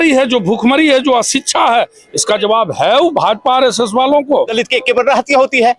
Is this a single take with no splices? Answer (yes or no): no